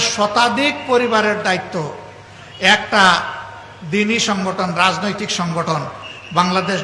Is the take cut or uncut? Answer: uncut